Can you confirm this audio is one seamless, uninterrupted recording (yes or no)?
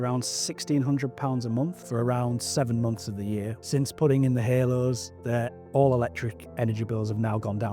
no